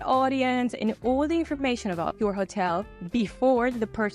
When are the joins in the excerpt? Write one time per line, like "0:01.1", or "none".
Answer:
0:02.1

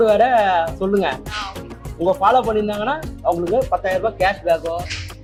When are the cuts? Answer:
none

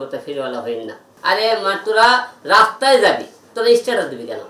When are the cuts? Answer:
0:01.1

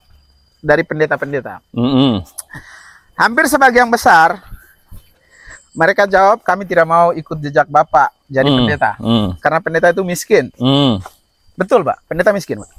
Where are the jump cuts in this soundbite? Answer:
none

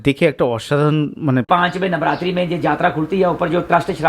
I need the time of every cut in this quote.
0:01.5

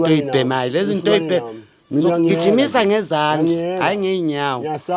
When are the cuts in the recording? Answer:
none

